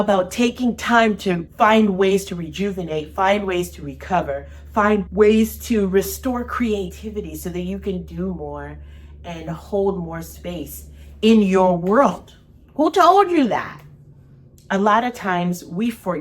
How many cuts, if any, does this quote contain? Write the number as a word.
two